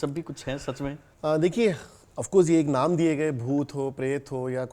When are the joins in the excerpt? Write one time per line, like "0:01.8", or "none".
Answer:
0:01.1